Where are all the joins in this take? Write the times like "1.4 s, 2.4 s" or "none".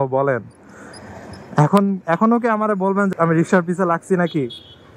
3.1 s